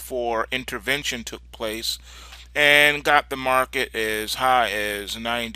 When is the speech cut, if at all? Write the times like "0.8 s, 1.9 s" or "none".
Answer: 1.7 s